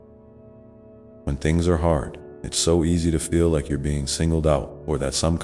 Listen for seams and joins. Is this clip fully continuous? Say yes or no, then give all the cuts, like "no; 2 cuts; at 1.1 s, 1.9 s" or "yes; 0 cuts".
yes; 0 cuts